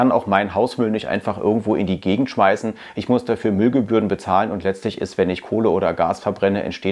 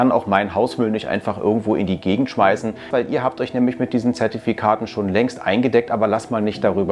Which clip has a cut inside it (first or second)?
second